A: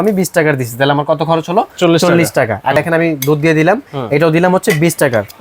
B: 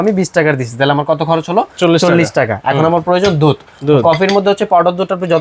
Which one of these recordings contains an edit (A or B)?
A